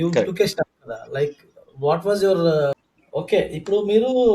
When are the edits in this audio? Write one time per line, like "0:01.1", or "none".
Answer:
0:02.9